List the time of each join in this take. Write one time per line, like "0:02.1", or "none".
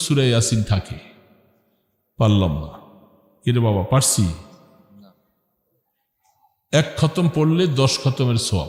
none